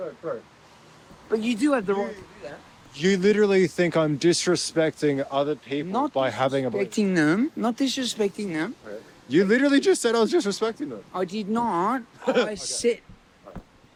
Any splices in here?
no; 0 cuts

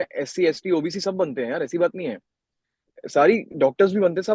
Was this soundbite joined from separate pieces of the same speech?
no; 0 cuts

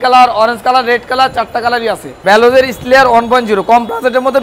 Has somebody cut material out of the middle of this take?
yes; 1 cut; at 2.2 s

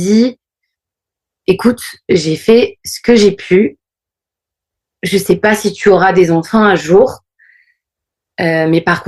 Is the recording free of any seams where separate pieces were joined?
no; 1 cut; at 1.4 s

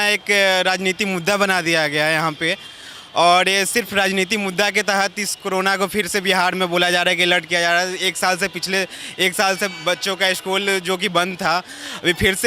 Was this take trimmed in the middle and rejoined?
no; 0 cuts

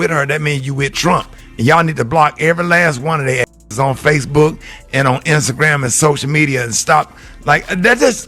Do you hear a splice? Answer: yes; 1 cut; at 1.9 s

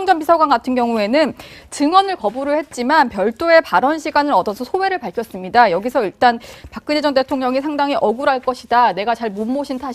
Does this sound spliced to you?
yes; 1 cut; at 4.6 s

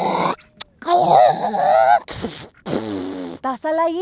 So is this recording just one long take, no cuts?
yes; 0 cuts

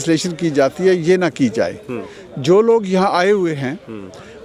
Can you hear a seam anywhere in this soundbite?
no; 0 cuts

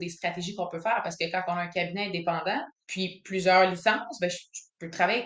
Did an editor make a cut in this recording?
yes; 1 cut; at 2.8 s

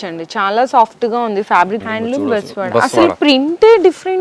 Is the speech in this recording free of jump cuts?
no; 1 cut; at 1.8 s

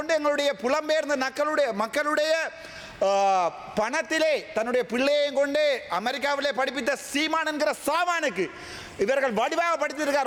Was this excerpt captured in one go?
yes; 0 cuts

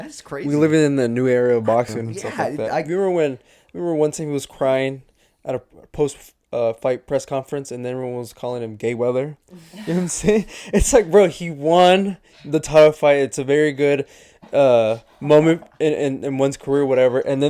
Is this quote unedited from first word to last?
no; 1 cut; at 2.9 s

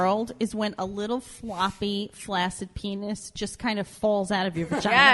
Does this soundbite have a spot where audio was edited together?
no; 0 cuts

